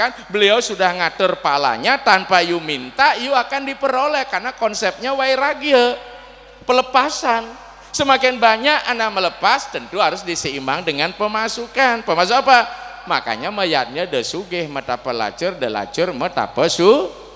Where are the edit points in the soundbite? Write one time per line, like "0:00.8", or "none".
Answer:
none